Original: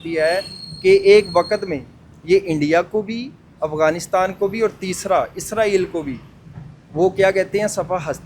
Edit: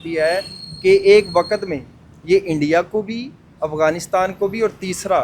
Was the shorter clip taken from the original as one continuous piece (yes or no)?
yes